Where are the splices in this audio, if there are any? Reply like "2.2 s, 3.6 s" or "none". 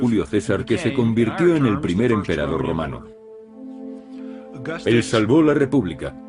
2.2 s